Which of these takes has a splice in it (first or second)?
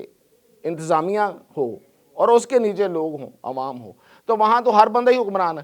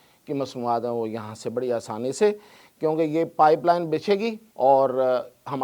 second